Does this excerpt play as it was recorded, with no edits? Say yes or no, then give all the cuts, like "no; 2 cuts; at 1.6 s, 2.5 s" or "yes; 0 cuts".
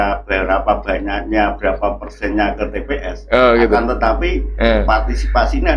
yes; 0 cuts